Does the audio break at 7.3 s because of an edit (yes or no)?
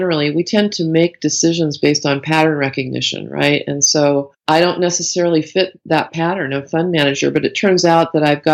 no